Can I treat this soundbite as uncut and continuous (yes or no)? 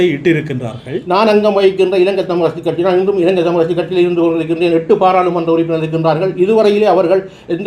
no